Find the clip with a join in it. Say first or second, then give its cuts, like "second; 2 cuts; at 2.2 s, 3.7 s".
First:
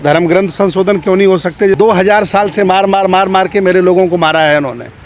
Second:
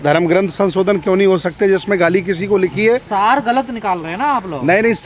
first; 1 cut; at 1.8 s